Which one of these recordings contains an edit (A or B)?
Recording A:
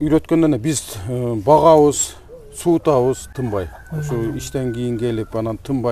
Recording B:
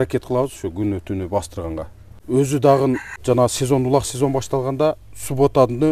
B